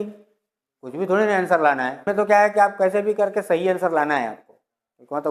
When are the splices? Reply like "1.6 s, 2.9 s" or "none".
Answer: 2.0 s